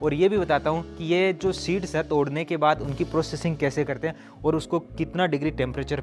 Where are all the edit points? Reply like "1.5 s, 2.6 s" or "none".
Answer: none